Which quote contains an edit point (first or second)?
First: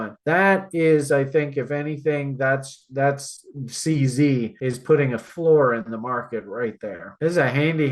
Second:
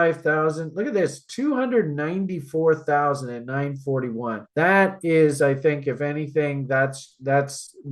first